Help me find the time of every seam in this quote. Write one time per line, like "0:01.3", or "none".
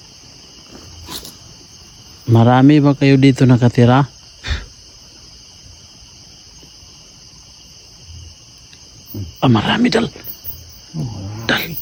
none